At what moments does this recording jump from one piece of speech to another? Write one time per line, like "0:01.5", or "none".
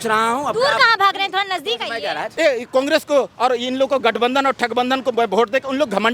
0:02.3